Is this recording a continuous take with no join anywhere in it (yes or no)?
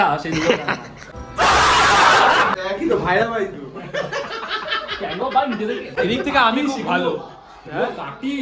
yes